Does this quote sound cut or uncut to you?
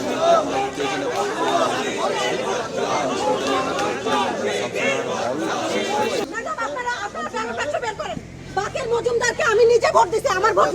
cut